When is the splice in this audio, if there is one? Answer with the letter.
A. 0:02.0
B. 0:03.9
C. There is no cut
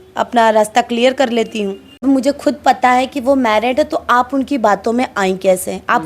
A